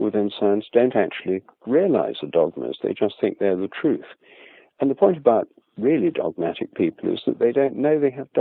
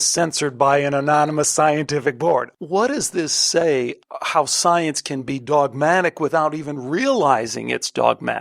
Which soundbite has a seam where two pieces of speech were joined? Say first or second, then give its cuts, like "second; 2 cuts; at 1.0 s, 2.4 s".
second; 2 cuts; at 2.5 s, 3.9 s